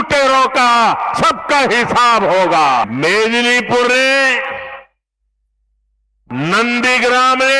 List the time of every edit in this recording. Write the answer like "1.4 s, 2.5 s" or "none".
2.9 s